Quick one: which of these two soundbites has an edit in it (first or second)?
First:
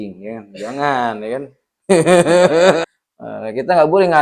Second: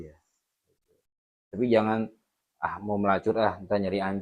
first